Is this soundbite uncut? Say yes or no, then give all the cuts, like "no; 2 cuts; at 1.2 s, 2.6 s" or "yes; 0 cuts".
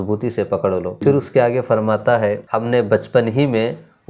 no; 2 cuts; at 1.0 s, 2.4 s